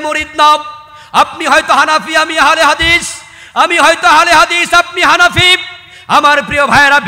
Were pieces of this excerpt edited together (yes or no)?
no